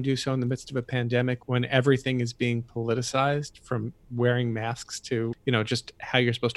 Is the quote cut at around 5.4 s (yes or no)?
yes